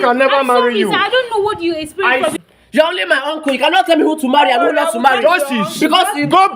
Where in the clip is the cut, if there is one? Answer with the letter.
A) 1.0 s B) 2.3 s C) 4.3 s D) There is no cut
B